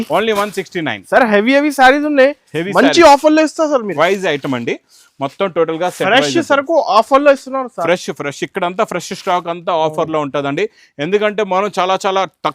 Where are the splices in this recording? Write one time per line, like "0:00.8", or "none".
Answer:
0:03.9